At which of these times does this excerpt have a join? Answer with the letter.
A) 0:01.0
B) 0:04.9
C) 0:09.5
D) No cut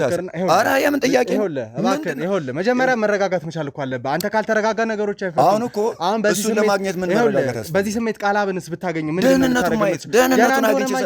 D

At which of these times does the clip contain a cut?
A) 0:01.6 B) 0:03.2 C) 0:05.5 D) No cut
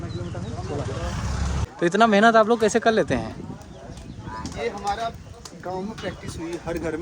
A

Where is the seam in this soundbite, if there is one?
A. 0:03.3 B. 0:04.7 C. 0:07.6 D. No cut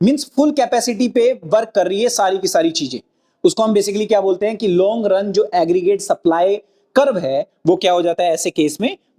D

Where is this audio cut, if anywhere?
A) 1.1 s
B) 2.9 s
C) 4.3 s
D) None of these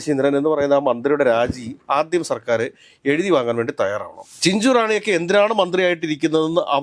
C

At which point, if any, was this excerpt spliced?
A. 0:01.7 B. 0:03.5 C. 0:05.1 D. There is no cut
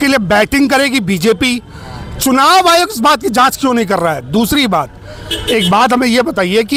D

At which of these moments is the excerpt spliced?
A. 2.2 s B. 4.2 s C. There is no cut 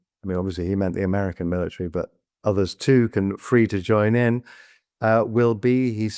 A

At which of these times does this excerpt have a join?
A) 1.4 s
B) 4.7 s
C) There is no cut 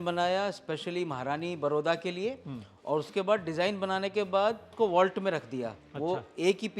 B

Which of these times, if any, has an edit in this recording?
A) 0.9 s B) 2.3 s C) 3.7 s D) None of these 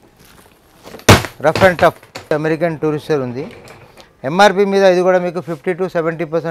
B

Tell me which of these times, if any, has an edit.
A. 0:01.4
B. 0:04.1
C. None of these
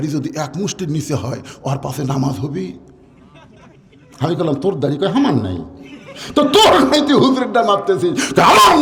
C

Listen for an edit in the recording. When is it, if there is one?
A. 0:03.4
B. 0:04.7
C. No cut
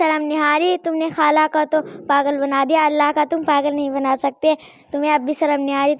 C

